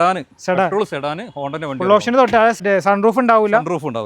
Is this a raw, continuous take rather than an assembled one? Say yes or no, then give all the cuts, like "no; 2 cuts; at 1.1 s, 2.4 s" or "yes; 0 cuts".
no; 1 cut; at 2.6 s